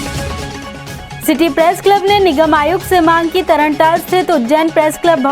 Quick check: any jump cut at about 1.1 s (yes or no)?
yes